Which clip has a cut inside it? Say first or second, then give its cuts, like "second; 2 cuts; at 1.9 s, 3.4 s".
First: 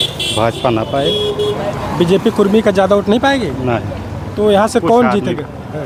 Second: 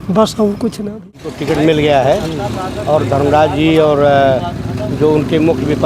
second; 1 cut; at 1.3 s